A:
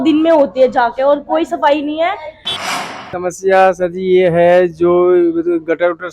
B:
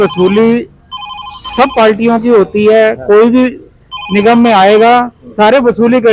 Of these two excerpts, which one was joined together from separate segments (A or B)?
A